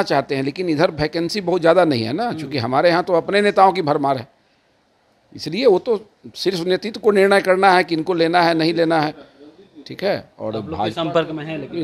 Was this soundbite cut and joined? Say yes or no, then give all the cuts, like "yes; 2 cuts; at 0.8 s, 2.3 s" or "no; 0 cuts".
no; 0 cuts